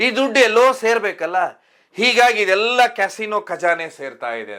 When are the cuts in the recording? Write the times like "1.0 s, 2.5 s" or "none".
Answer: none